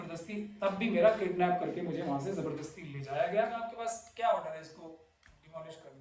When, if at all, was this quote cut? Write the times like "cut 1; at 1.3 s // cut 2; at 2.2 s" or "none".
cut 1; at 3.7 s

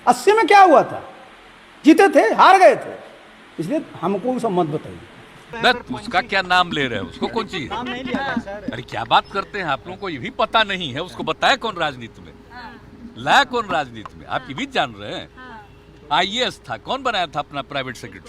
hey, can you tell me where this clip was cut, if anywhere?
cut 1; at 5.4 s

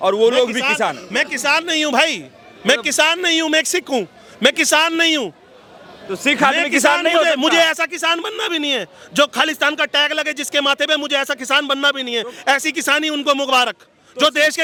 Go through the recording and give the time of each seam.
none

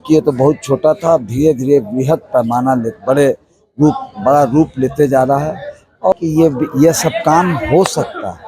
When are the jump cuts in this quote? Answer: cut 1; at 6.1 s

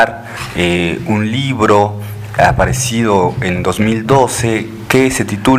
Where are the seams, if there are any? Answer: none

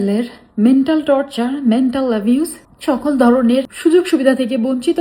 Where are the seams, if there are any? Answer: cut 1; at 2.7 s // cut 2; at 3.7 s

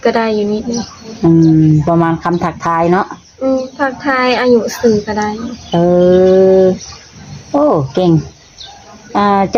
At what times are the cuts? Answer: none

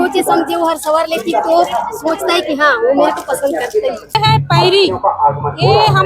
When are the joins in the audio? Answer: cut 1; at 4.2 s

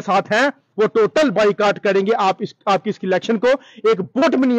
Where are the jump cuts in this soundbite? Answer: none

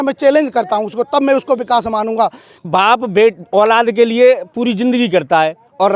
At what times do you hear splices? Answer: cut 1; at 2.7 s

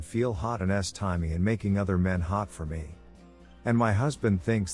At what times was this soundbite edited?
cut 1; at 3.1 s

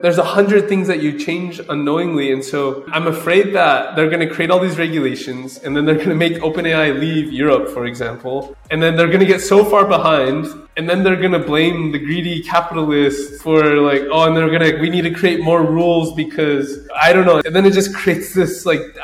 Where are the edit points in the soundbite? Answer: cut 1; at 13.3 s // cut 2; at 16.8 s

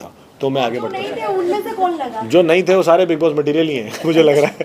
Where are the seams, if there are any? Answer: cut 1; at 1.1 s

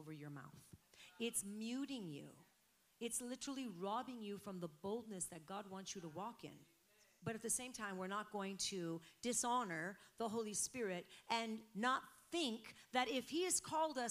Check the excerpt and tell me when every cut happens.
cut 1; at 7.1 s

